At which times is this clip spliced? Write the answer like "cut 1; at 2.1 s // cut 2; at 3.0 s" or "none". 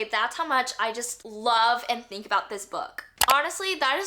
cut 1; at 3.1 s